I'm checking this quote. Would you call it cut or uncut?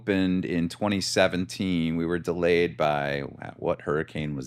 uncut